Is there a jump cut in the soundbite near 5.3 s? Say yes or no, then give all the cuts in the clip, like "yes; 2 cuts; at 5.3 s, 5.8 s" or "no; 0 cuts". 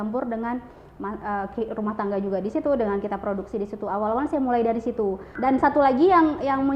yes; 1 cut; at 5.3 s